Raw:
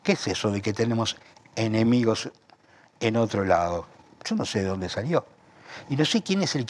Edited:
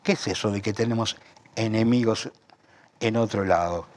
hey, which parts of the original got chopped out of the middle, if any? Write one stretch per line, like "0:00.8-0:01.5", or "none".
none